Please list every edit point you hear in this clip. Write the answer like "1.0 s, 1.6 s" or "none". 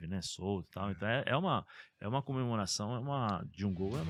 none